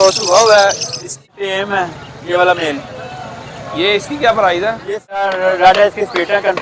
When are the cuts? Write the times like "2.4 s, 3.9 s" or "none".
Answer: 1.3 s, 5.1 s